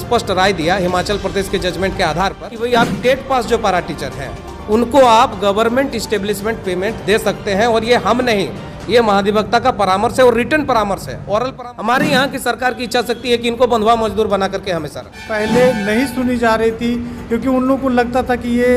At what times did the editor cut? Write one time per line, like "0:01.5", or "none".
0:02.4
0:11.5
0:15.2